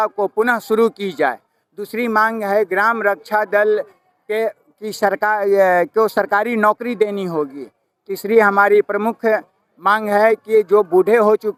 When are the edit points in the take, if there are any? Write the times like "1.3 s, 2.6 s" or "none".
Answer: none